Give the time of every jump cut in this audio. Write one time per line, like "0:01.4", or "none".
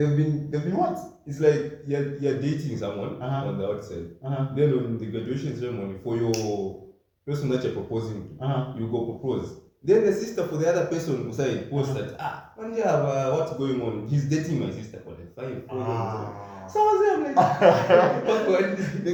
none